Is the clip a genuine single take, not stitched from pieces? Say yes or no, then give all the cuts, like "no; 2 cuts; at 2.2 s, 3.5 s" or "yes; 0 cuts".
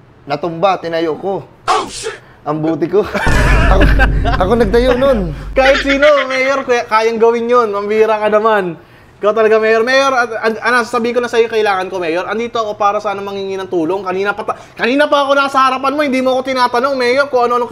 yes; 0 cuts